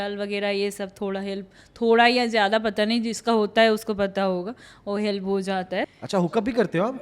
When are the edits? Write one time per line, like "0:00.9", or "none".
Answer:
0:05.9